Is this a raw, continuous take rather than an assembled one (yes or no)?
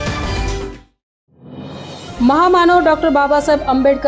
no